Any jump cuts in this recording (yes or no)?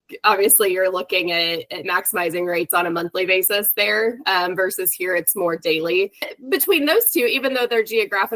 yes